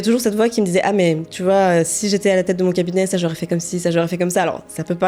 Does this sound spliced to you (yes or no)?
no